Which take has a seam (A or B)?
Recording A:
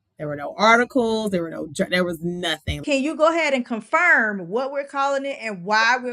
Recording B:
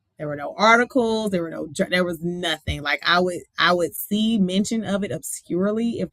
A